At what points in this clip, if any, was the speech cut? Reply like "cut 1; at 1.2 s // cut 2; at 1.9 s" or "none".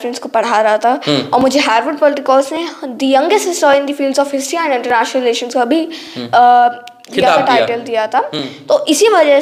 none